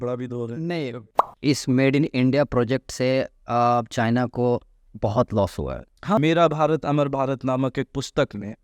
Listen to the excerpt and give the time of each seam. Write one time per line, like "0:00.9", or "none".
0:01.0
0:06.2